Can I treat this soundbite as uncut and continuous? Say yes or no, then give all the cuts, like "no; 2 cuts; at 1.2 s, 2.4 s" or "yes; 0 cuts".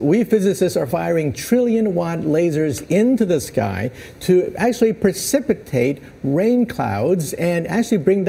yes; 0 cuts